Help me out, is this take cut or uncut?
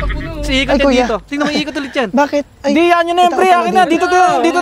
uncut